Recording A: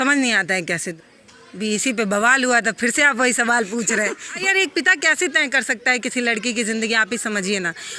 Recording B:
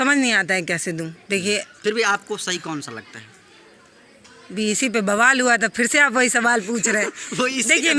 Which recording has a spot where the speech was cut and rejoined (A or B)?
A